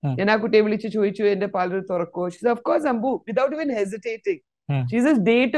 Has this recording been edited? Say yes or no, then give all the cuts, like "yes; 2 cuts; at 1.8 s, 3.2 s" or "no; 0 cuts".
no; 0 cuts